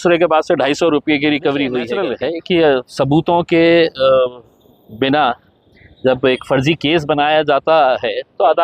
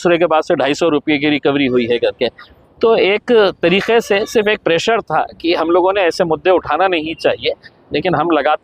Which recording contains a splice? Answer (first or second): first